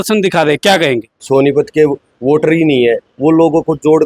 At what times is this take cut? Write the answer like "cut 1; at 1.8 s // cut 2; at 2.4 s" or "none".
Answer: cut 1; at 1.1 s